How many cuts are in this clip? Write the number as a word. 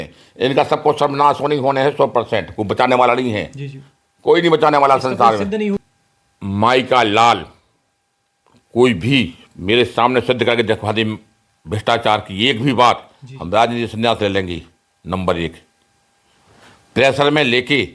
one